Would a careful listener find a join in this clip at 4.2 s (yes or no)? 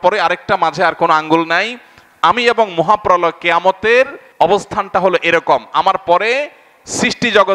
yes